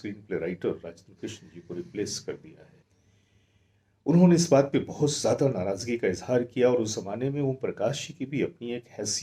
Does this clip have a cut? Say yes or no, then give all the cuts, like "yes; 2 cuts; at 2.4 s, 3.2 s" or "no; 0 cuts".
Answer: yes; 1 cut; at 2.8 s